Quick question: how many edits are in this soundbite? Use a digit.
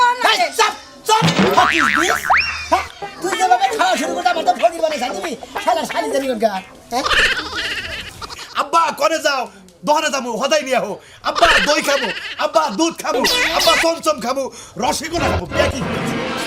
1